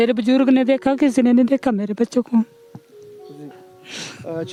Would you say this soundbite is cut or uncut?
uncut